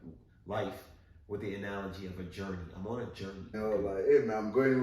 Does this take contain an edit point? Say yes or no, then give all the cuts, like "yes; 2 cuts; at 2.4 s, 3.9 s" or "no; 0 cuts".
yes; 1 cut; at 3.6 s